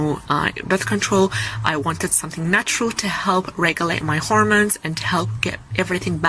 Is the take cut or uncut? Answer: uncut